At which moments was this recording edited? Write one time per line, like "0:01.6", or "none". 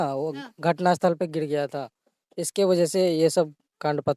none